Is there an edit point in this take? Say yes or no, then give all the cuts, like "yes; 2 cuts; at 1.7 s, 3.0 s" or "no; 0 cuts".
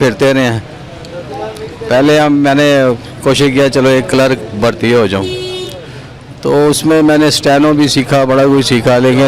no; 0 cuts